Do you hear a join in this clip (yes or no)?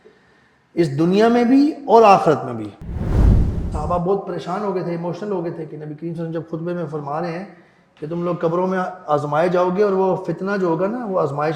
yes